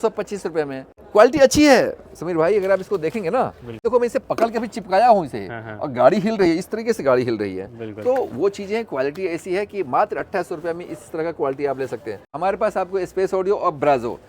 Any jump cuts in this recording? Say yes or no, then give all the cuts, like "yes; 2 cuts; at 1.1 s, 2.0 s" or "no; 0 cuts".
yes; 3 cuts; at 1.0 s, 3.7 s, 12.3 s